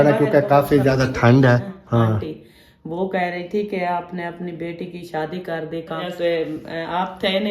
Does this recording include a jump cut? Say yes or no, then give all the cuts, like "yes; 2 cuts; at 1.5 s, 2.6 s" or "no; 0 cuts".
yes; 2 cuts; at 1.8 s, 6.0 s